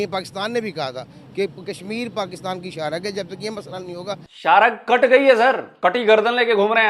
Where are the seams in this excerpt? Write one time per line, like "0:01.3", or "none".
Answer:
0:04.3
0:05.7